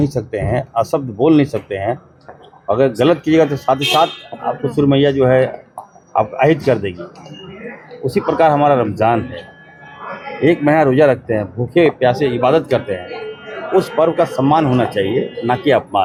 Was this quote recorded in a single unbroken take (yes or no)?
yes